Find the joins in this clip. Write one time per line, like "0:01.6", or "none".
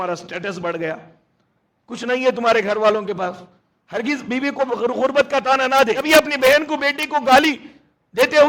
0:06.0

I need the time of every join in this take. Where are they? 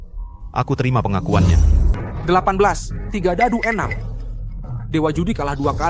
0:02.0

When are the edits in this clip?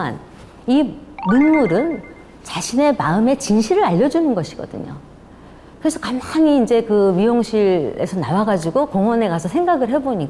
none

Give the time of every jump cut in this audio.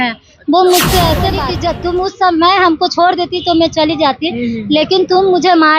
0:01.4

